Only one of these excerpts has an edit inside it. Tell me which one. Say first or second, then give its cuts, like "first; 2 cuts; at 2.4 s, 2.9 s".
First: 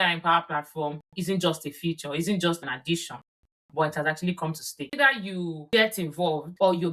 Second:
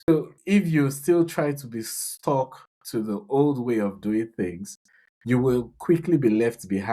first; 1 cut; at 4.9 s